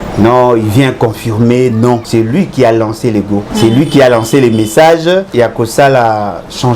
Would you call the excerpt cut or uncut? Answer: cut